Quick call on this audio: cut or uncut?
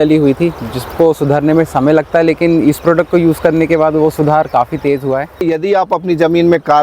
cut